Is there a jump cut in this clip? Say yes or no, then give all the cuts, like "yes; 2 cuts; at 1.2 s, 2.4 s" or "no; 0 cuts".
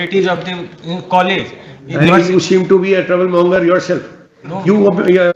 no; 0 cuts